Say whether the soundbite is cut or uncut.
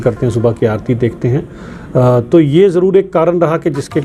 uncut